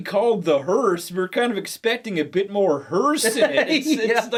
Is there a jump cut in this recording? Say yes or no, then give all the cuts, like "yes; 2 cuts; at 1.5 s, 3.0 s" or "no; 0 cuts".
no; 0 cuts